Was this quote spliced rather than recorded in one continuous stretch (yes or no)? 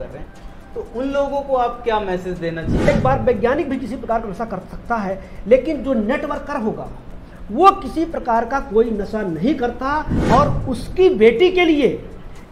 yes